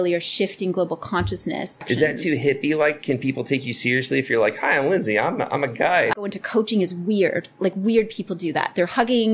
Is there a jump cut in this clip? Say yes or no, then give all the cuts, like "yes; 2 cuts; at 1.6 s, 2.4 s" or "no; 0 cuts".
yes; 2 cuts; at 1.8 s, 6.1 s